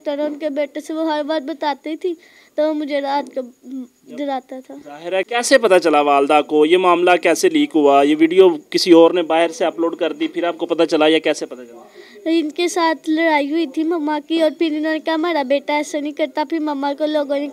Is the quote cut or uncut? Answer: cut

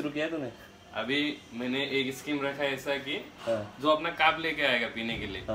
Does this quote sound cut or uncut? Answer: uncut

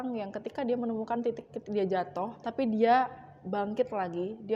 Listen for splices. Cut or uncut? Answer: cut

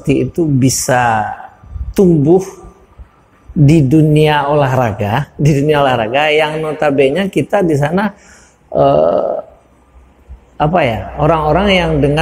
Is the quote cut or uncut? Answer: uncut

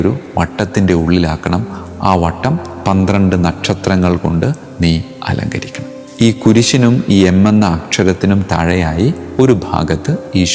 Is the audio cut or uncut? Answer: uncut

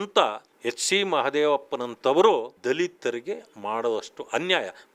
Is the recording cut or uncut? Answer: cut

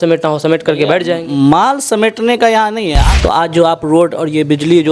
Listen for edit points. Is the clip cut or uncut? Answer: cut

